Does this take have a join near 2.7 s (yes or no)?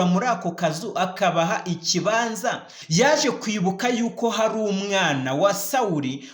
yes